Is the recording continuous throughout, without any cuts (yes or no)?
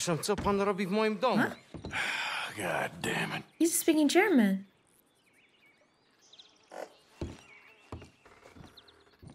yes